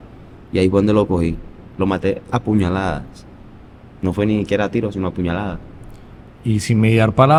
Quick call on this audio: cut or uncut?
uncut